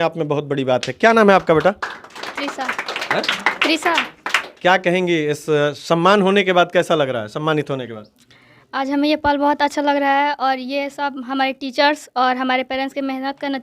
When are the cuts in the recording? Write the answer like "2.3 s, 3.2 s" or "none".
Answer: none